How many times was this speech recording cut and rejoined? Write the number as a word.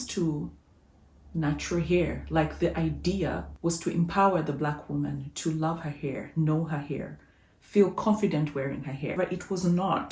two